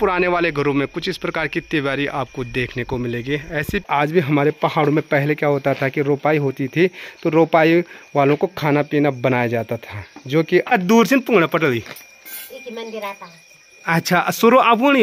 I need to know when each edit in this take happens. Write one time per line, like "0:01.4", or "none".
0:03.9
0:10.7